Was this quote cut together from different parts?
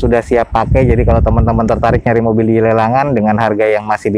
no; 0 cuts

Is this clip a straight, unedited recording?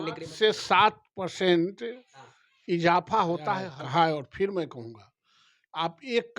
no; 1 cut; at 3.7 s

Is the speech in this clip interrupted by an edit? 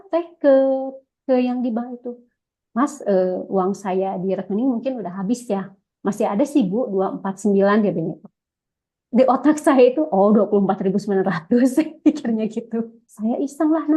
yes; 1 cut; at 13.0 s

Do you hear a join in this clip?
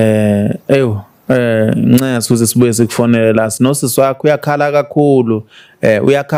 no; 0 cuts

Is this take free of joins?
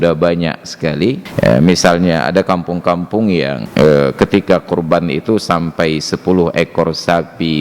no; 2 cuts; at 1.3 s, 3.6 s

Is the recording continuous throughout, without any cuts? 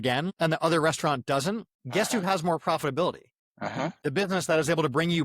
no; 2 cuts; at 1.7 s, 3.9 s

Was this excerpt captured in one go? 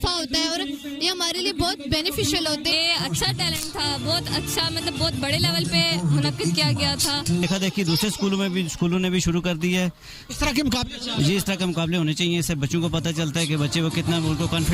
no; 2 cuts; at 2.7 s, 7.4 s

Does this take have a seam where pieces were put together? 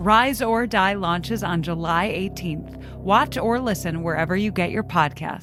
no; 0 cuts

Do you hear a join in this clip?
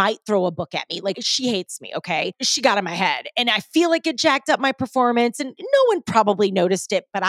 yes; 2 cuts; at 1.2 s, 2.4 s

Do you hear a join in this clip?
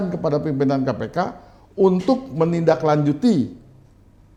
no; 0 cuts

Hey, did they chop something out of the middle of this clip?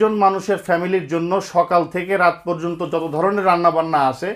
no; 0 cuts

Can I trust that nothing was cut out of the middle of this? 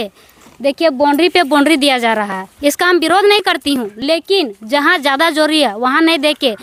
yes; 0 cuts

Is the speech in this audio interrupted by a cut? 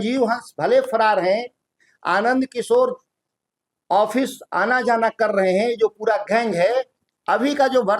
yes; 1 cut; at 7.0 s

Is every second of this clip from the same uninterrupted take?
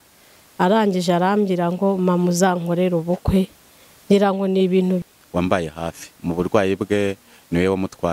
no; 1 cut; at 5.0 s

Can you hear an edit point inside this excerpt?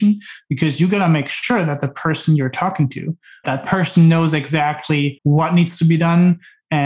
yes; 2 cuts; at 3.4 s, 5.2 s

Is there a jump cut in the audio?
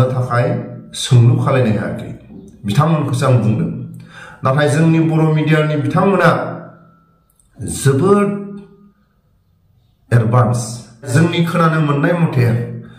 yes; 1 cut; at 11.1 s

